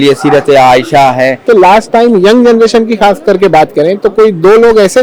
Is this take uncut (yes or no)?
no